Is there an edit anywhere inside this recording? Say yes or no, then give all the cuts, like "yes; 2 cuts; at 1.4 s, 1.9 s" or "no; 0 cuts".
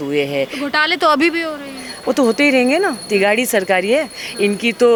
no; 0 cuts